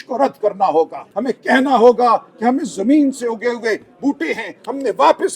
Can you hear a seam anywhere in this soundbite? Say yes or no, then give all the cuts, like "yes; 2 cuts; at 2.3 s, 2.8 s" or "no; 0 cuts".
yes; 1 cut; at 1.0 s